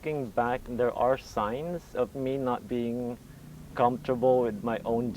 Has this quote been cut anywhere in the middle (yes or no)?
yes